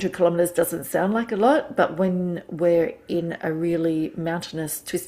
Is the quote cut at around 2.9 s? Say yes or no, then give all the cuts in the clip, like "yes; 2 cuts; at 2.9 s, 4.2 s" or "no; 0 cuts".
no; 0 cuts